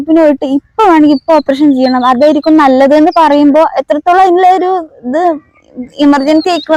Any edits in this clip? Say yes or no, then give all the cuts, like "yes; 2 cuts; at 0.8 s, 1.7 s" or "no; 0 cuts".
no; 0 cuts